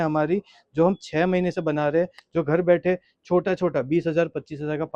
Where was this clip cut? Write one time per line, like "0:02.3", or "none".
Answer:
0:02.2